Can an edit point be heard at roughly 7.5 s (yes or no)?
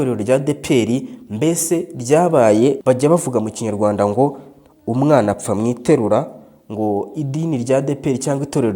no